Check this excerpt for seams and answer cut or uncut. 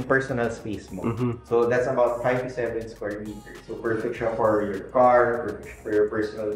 uncut